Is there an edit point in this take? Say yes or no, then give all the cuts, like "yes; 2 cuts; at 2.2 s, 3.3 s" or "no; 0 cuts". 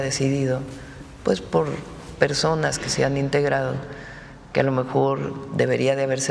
no; 0 cuts